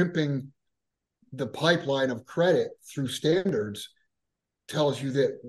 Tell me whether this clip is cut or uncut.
cut